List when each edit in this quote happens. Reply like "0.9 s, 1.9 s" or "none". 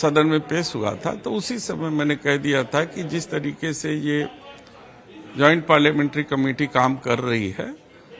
none